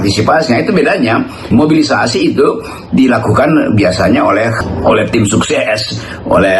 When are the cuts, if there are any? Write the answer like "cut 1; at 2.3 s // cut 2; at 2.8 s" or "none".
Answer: cut 1; at 1.5 s // cut 2; at 4.6 s